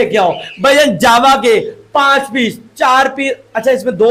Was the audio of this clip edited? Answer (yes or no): no